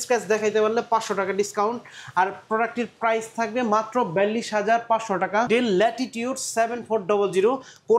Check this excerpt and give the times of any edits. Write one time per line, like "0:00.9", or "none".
0:05.5